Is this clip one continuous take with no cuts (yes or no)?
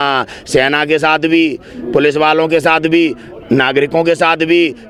yes